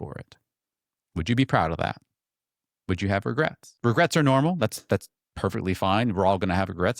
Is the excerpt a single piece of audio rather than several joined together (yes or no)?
no